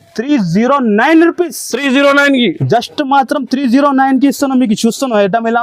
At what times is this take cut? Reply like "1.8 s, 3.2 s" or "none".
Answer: none